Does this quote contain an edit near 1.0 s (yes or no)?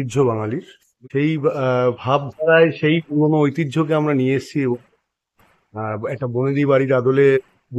yes